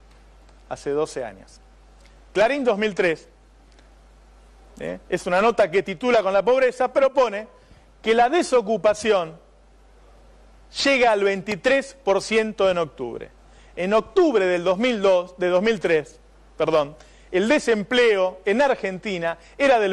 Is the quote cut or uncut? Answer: uncut